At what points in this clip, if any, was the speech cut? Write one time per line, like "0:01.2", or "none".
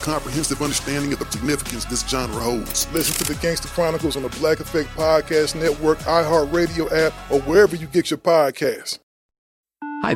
0:08.9